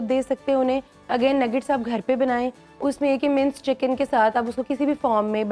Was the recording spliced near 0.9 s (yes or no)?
no